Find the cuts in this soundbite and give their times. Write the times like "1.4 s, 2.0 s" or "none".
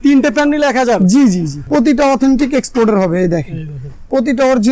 1.5 s